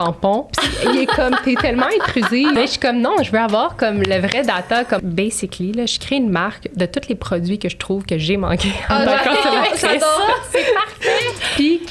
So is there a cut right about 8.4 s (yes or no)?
no